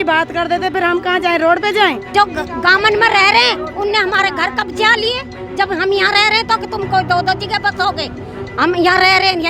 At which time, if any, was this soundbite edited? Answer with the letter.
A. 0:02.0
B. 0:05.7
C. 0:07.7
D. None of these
A